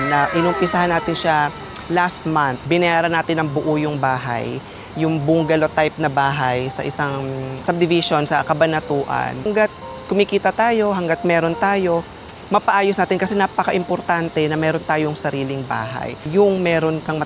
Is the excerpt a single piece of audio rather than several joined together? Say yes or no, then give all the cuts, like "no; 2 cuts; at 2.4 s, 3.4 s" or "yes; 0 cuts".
no; 3 cuts; at 2.6 s, 9.4 s, 16.2 s